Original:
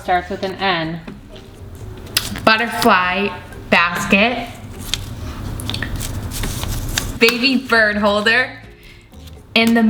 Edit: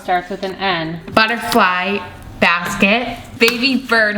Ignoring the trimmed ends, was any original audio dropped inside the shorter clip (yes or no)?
yes